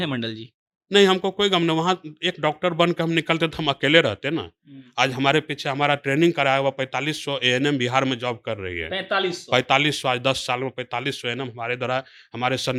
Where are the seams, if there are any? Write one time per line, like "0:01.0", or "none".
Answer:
none